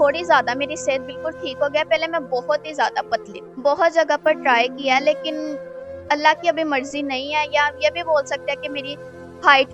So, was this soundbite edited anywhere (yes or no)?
yes